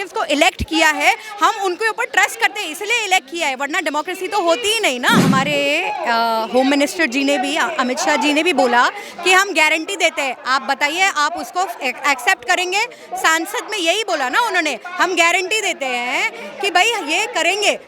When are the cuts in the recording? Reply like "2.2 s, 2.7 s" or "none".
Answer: 5.2 s